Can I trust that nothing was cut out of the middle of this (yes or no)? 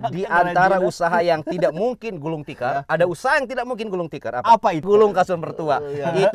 no